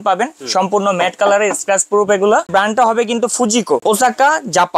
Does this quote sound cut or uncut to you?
cut